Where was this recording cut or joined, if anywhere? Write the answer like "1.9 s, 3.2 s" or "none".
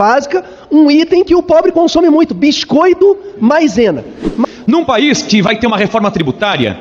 4.4 s